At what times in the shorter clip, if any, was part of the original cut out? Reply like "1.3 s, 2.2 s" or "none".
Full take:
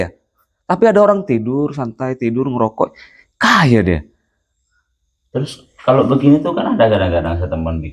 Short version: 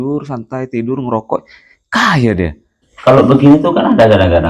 2.8 s